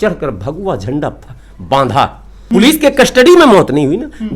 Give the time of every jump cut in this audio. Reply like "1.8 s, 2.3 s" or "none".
2.5 s